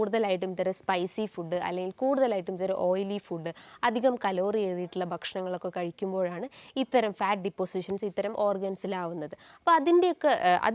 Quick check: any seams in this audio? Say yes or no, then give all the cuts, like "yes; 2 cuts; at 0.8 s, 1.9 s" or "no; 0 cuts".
no; 0 cuts